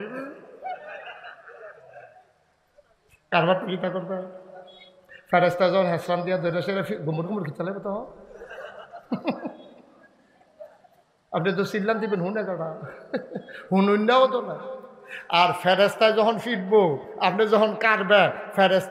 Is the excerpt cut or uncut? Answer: uncut